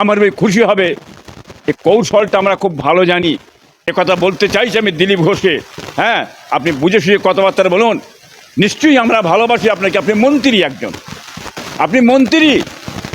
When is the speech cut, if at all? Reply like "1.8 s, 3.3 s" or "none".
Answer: 3.8 s